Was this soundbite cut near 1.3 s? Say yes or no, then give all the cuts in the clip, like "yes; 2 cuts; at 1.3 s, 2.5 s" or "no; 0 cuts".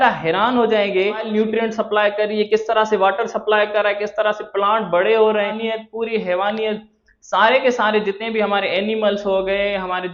yes; 2 cuts; at 1.3 s, 5.6 s